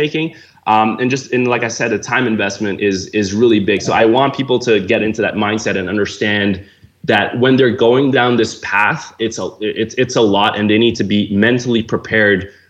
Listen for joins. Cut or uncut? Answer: cut